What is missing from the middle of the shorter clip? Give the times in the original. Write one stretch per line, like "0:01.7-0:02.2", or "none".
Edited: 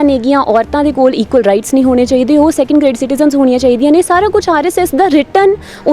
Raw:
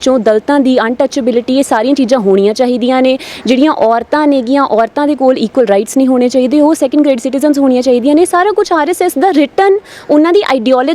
none